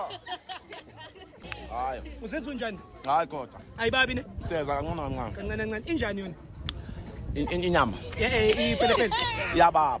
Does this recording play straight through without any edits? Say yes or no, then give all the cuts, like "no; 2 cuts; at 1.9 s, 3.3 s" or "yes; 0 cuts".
no; 1 cut; at 1.4 s